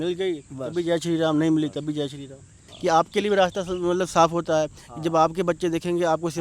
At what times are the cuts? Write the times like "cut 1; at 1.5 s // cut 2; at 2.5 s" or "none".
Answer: cut 1; at 2.6 s